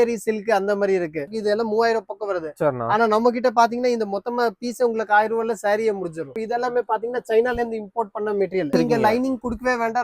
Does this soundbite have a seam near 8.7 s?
yes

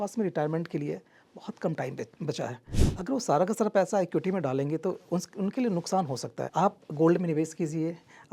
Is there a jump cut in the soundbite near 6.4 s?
yes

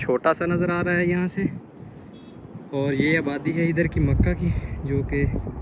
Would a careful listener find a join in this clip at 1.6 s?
no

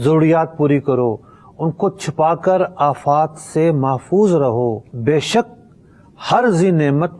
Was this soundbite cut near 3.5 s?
no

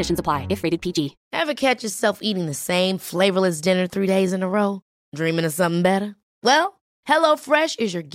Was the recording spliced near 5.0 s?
no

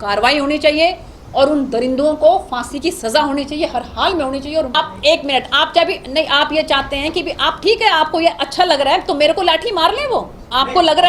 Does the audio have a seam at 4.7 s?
yes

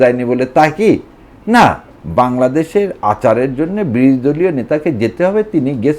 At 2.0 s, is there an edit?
yes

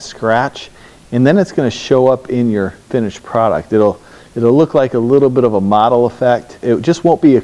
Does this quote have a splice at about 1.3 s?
no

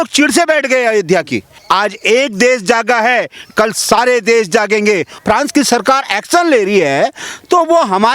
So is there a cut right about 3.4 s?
no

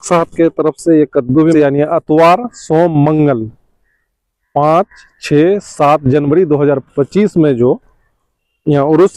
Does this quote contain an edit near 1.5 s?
yes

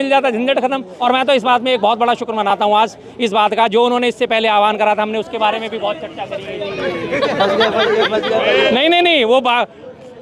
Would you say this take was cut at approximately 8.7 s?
yes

